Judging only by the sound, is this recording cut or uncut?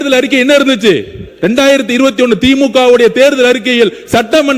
uncut